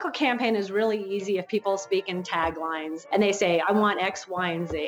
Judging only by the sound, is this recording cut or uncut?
cut